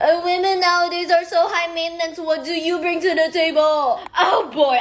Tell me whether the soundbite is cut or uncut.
uncut